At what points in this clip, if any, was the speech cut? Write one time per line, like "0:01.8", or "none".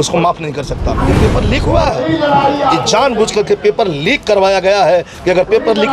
0:01.1